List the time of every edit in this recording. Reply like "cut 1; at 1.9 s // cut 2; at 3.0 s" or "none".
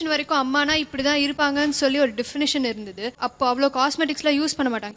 none